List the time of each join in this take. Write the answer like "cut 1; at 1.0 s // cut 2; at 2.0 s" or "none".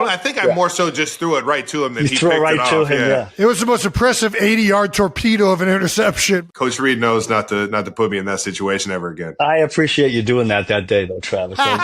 cut 1; at 6.4 s // cut 2; at 9.2 s